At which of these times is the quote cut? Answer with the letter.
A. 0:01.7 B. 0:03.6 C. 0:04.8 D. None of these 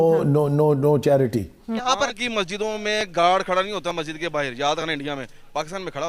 A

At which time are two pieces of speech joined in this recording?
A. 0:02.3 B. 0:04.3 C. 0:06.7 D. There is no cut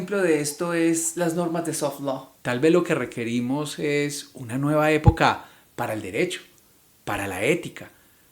A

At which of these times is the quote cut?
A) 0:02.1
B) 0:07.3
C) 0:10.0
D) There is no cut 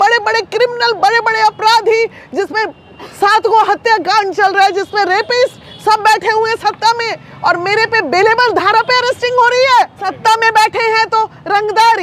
D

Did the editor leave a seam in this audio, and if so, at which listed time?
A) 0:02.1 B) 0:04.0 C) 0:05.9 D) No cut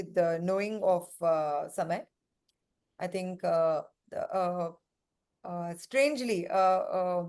D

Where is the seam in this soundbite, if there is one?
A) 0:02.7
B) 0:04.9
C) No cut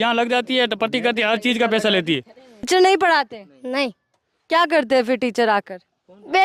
A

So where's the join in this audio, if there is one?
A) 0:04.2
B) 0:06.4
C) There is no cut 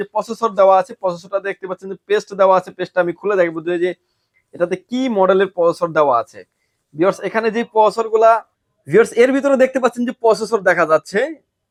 C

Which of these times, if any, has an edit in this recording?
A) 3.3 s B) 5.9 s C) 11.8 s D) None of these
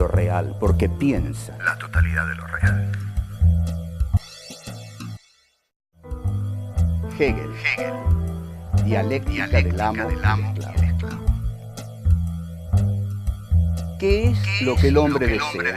C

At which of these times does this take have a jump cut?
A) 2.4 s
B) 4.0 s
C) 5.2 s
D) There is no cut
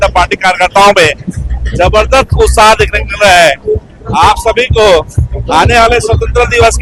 D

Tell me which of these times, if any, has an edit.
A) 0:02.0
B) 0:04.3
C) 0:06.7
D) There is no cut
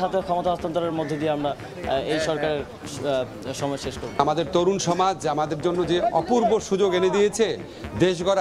B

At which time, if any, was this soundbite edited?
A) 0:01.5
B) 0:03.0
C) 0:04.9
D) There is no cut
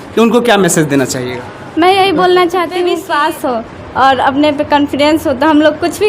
B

